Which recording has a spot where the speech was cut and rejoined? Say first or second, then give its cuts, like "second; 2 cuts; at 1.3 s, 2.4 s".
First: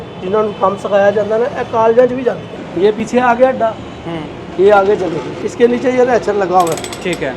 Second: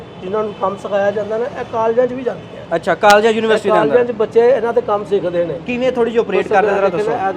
first; 2 cuts; at 2.9 s, 5.4 s